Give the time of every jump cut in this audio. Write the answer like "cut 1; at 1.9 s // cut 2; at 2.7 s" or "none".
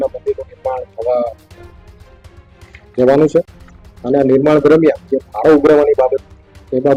none